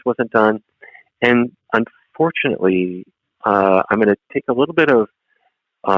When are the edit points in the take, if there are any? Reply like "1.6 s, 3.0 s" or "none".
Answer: none